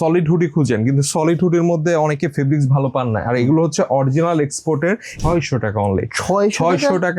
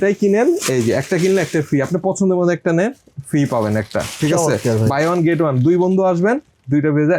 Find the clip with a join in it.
first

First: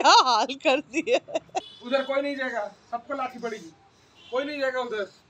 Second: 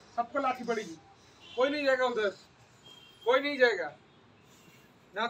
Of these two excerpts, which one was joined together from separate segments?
first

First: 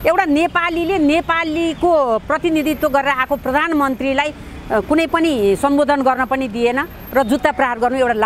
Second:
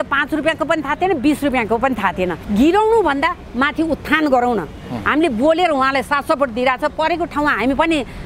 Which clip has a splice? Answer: second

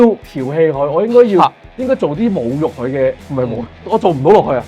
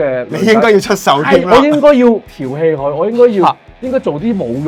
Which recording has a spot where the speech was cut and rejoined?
first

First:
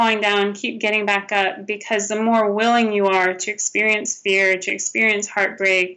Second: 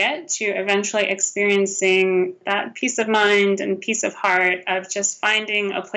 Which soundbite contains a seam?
second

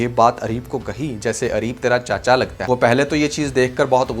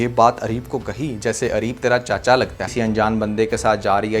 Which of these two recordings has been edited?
second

